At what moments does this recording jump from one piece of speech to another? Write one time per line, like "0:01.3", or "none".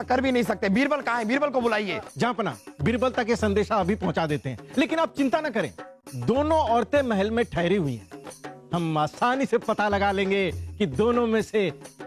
none